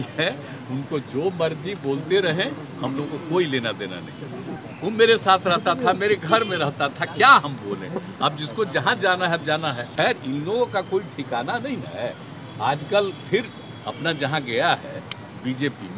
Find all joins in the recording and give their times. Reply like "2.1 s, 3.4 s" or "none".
4.5 s, 9.8 s